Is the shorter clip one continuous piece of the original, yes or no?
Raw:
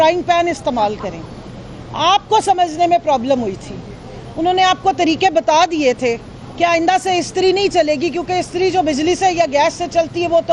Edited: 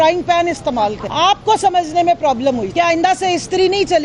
no